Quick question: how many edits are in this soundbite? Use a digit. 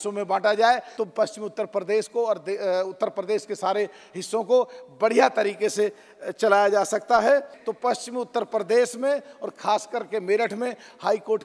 2